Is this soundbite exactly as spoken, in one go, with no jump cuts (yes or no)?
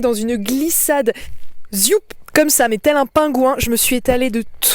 yes